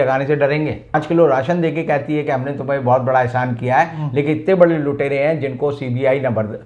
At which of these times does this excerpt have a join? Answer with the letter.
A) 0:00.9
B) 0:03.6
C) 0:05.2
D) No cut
A